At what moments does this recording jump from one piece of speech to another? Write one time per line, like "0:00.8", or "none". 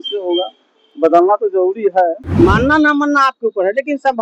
0:02.2